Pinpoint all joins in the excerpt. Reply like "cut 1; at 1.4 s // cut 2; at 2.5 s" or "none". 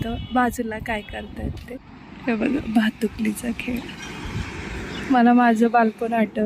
cut 1; at 1.7 s